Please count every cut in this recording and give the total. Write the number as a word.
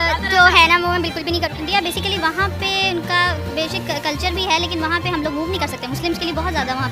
one